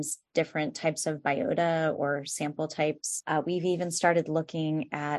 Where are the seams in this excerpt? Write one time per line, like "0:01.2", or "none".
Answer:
none